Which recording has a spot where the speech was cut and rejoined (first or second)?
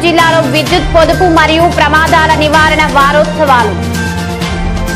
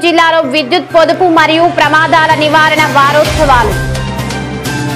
first